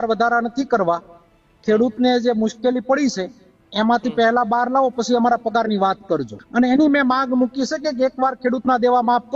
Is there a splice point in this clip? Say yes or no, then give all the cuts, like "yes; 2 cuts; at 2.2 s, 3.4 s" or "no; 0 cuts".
yes; 1 cut; at 6.4 s